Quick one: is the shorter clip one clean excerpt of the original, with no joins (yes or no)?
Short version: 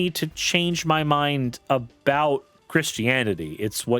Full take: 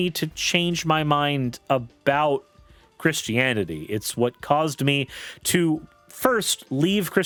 no